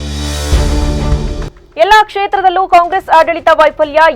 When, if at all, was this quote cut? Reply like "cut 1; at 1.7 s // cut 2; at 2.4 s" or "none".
cut 1; at 1.5 s